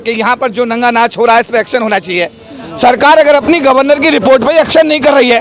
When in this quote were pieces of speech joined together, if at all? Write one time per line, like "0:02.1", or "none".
none